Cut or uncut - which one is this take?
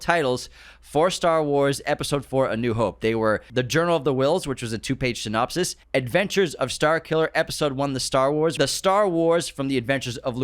cut